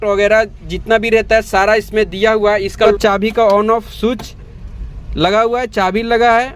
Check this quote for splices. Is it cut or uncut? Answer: cut